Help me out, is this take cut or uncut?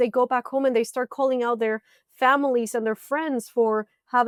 uncut